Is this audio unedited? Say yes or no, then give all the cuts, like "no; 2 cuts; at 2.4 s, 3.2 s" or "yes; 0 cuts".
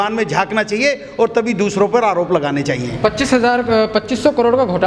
yes; 0 cuts